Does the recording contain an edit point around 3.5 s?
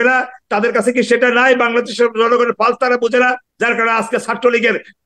yes; 1 cut; at 3.5 s

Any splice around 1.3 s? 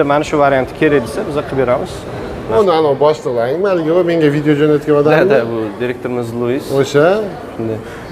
no; 1 cut; at 2.6 s

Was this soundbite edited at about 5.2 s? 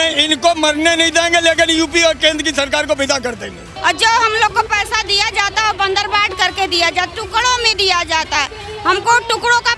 no; 1 cut; at 3.7 s

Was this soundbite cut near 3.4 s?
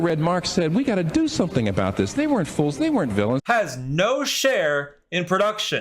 yes; 1 cut; at 3.4 s

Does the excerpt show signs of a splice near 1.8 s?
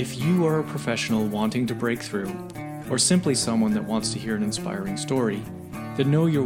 no; 0 cuts

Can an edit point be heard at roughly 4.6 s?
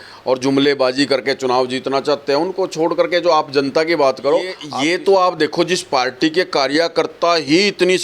yes; 1 cut; at 4.6 s

